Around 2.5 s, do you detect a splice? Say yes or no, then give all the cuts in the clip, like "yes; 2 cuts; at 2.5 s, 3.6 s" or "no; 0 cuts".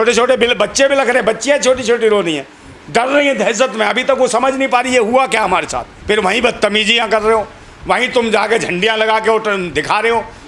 no; 1 cut; at 5.9 s